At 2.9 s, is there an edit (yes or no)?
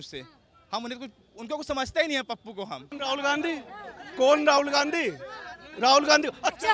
yes